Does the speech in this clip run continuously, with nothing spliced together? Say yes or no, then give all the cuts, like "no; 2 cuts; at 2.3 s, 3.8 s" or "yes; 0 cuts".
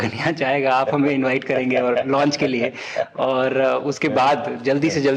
yes; 0 cuts